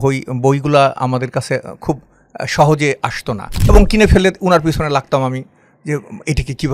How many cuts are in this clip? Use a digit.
1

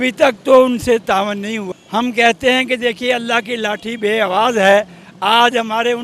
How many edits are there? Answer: 1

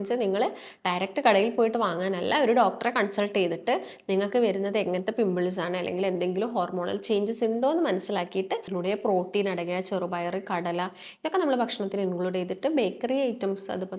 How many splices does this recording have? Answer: 1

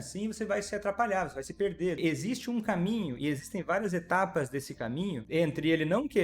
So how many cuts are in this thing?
2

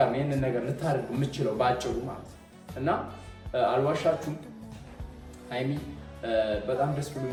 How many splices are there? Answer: 0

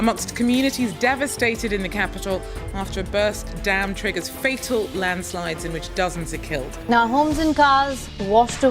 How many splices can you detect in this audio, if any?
1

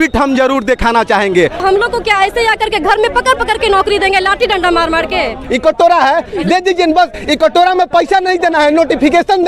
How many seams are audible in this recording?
2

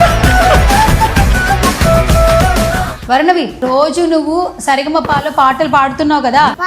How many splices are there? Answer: 0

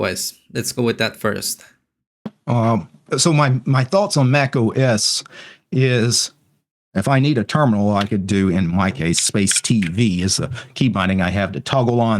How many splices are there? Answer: 1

